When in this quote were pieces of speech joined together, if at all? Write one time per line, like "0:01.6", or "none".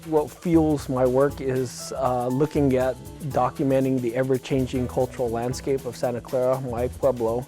0:03.1